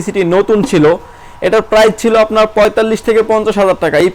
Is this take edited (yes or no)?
no